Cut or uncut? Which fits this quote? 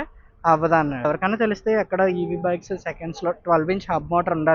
cut